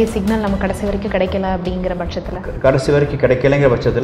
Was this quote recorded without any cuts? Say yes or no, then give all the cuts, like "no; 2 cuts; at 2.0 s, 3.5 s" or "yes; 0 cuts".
yes; 0 cuts